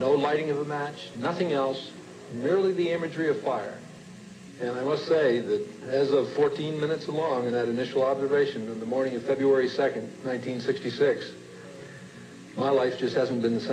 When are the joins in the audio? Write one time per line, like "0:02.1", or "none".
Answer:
none